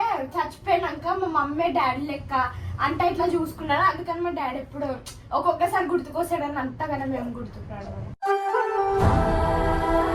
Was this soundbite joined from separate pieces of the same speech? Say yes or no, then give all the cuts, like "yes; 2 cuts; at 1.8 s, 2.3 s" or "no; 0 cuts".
no; 0 cuts